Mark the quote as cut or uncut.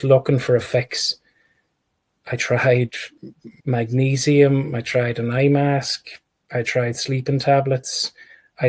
cut